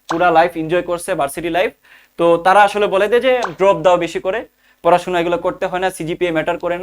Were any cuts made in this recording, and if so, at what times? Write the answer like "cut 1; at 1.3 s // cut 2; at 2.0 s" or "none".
none